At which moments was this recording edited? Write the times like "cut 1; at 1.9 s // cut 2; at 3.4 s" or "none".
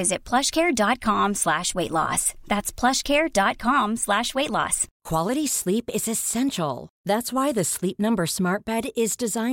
none

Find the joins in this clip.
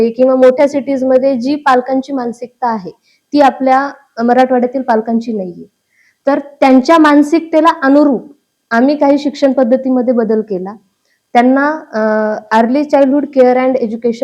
none

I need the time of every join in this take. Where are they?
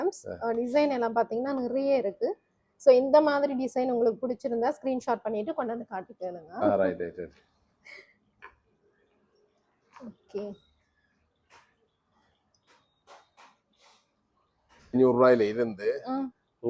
none

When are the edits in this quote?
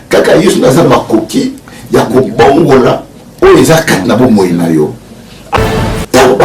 cut 1; at 5.5 s

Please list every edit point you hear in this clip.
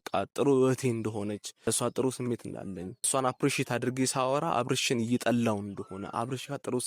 cut 1; at 1.5 s // cut 2; at 3.1 s

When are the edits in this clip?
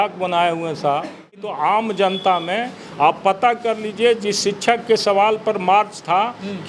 cut 1; at 1.5 s

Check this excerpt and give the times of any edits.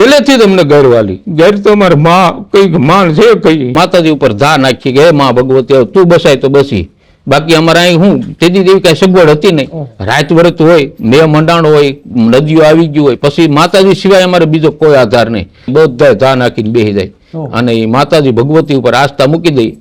cut 1; at 3.8 s // cut 2; at 15.7 s

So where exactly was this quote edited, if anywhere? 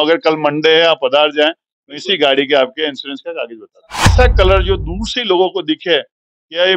cut 1; at 4.0 s

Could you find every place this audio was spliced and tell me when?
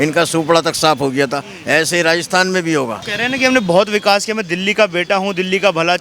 cut 1; at 3.1 s

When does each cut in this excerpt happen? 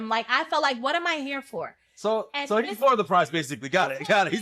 none

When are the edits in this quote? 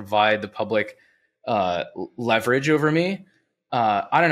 none

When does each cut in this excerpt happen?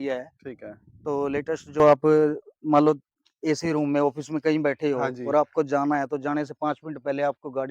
cut 1; at 1.8 s

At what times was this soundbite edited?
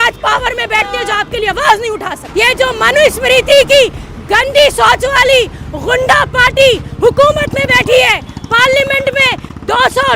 cut 1; at 2.2 s

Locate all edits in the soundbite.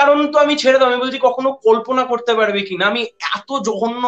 none

